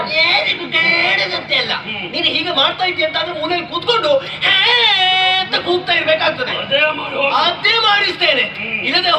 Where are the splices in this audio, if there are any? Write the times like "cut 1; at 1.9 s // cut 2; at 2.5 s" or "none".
none